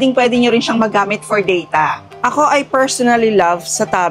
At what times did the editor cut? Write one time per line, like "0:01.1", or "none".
0:02.0

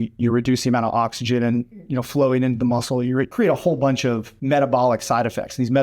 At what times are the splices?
0:03.3
0:04.3

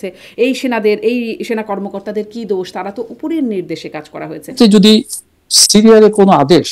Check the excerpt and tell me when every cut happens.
0:04.5

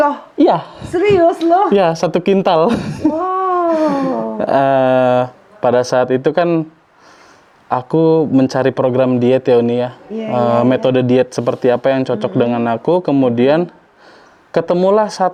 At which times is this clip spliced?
none

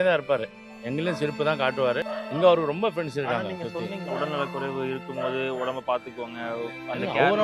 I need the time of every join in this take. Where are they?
0:02.1

